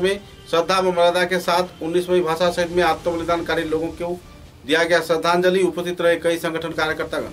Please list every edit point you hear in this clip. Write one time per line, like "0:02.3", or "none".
none